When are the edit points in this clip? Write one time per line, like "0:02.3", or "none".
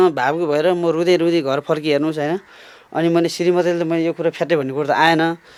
none